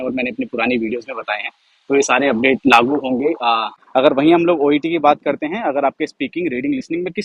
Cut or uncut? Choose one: cut